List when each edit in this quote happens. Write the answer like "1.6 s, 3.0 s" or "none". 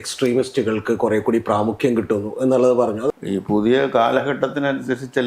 3.1 s